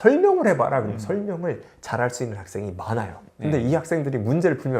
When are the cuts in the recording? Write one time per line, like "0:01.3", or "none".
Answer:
0:03.2

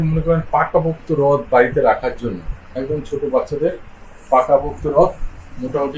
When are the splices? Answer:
none

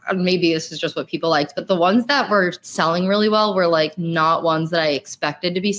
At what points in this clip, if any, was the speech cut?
none

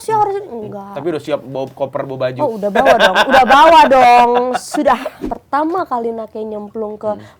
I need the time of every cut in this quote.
0:05.1

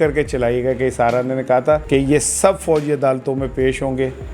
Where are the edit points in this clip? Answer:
0:01.8

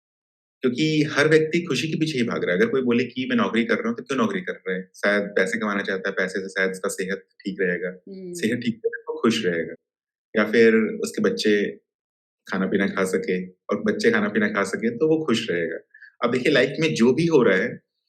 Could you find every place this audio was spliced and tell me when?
none

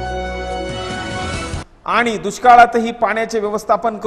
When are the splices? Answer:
0:01.7

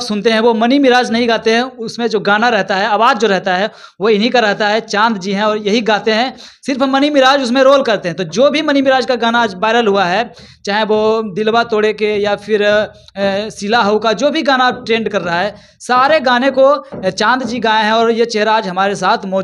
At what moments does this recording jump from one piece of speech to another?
none

